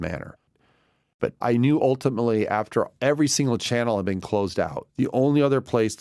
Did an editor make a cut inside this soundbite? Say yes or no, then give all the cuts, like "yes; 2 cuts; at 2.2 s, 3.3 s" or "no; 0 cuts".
no; 0 cuts